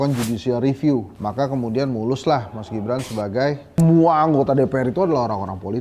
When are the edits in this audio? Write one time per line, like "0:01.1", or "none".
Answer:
0:03.8